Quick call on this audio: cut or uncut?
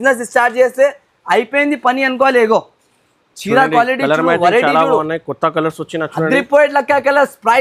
uncut